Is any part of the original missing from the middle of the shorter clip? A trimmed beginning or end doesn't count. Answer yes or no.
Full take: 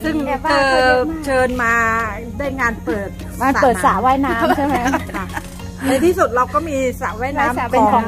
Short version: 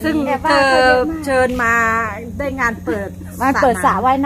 no